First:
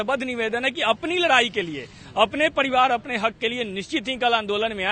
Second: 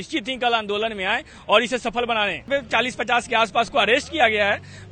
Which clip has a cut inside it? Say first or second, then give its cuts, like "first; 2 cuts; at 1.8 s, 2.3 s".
second; 1 cut; at 2.5 s